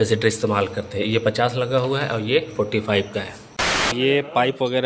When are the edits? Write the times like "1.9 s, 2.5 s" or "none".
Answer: 3.9 s

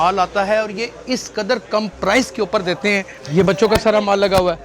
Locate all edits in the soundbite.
3.1 s

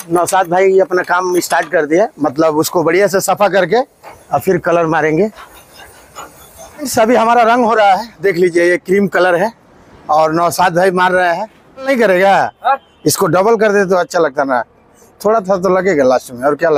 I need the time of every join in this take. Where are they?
6.8 s, 11.9 s

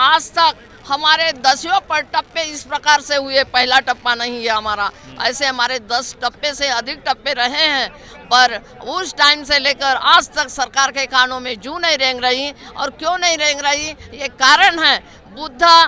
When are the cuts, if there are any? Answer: none

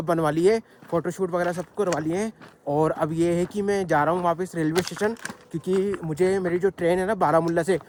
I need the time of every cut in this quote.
none

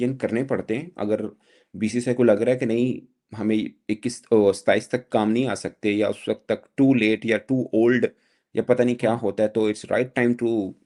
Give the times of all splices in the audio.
none

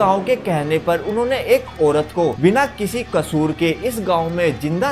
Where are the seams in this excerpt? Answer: 2.4 s

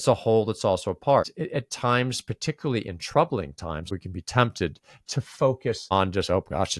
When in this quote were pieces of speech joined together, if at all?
1.4 s, 3.9 s, 5.9 s

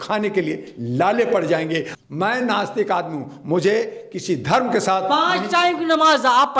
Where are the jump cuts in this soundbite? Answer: 1.9 s

